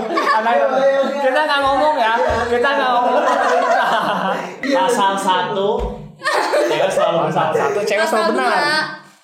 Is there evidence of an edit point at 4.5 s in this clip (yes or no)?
yes